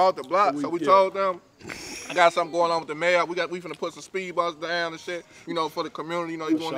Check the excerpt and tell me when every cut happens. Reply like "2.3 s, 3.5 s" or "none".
none